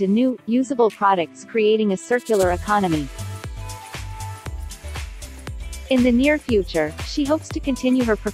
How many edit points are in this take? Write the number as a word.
two